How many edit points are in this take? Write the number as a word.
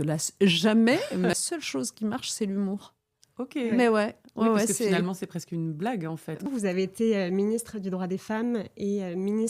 two